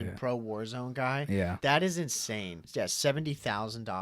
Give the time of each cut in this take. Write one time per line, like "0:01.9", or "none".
0:01.5
0:02.6

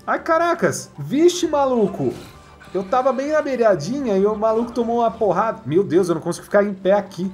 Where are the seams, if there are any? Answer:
0:00.9

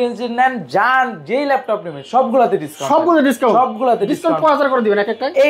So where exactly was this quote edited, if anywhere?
none

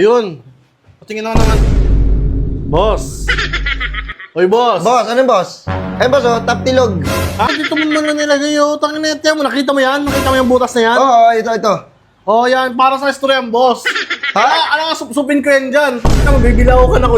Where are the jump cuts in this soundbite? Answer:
0:07.5

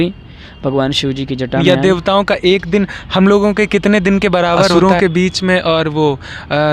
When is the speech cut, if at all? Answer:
0:01.6
0:04.7

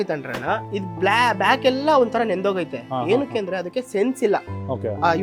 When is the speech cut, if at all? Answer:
none

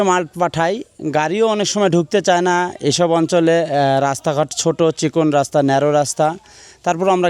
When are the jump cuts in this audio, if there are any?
none

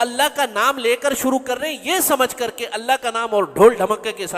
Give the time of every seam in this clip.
none

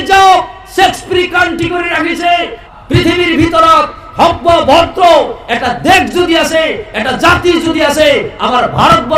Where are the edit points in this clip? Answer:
0:02.6

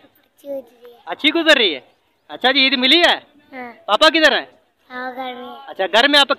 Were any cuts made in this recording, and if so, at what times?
none

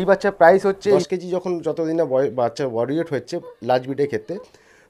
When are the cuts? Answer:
0:01.0

